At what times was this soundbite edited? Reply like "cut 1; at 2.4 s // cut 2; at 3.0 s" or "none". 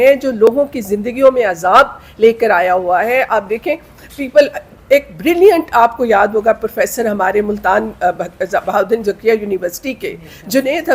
none